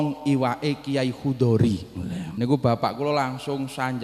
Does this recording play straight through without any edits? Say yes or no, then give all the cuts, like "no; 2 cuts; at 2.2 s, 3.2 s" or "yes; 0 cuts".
no; 1 cut; at 2.2 s